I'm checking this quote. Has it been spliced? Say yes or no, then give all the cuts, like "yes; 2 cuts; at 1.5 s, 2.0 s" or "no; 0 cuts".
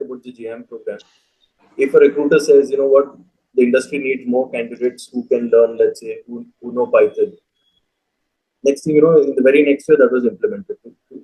no; 0 cuts